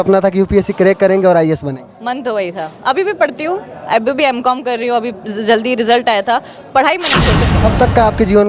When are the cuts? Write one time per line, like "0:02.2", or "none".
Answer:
0:07.5